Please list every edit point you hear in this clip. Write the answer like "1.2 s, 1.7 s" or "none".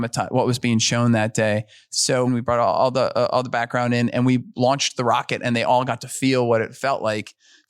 2.3 s